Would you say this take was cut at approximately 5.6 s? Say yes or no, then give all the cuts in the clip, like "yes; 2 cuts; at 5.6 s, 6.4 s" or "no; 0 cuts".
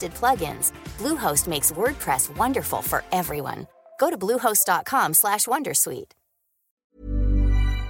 no; 1 cut; at 6.9 s